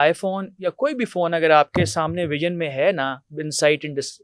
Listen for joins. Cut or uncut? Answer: uncut